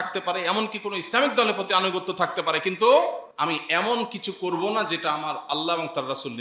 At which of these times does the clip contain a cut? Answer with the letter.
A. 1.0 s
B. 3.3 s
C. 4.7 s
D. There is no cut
B